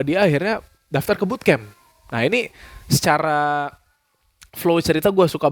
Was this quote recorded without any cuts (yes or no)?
yes